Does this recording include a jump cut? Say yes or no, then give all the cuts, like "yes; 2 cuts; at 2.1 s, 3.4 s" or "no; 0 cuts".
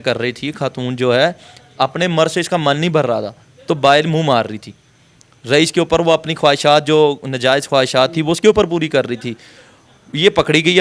no; 0 cuts